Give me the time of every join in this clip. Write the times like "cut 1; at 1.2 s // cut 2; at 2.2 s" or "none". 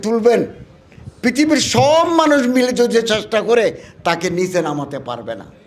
none